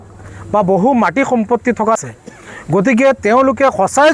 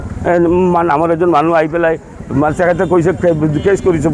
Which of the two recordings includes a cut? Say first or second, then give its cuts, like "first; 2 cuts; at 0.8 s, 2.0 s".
first; 1 cut; at 2.0 s